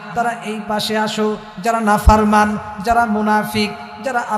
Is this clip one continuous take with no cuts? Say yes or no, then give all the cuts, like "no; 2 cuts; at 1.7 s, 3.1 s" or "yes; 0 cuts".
yes; 0 cuts